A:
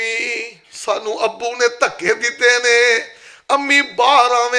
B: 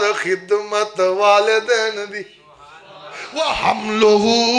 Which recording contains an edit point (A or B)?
B